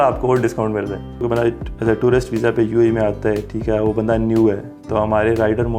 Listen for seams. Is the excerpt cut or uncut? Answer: cut